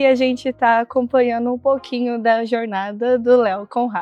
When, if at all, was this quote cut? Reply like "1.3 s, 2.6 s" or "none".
none